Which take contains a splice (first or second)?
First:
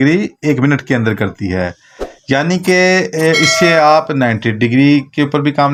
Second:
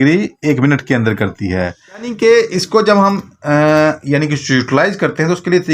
second